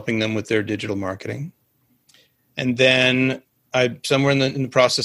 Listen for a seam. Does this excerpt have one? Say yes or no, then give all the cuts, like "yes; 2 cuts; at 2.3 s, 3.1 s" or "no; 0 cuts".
no; 0 cuts